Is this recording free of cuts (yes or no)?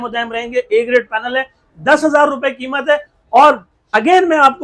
yes